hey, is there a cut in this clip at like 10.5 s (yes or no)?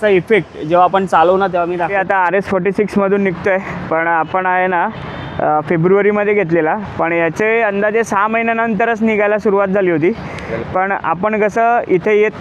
no